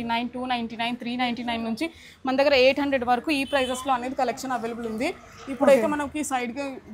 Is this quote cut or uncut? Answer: uncut